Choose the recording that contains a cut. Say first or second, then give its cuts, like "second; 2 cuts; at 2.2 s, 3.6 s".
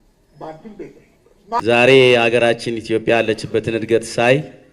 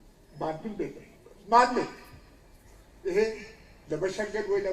first; 1 cut; at 1.6 s